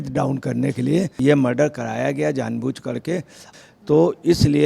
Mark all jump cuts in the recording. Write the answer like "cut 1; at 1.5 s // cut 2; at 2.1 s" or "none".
cut 1; at 3.5 s